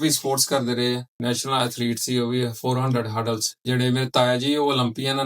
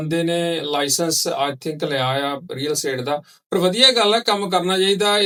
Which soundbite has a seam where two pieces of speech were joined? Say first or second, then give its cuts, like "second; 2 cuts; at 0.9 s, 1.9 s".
first; 2 cuts; at 1.1 s, 3.5 s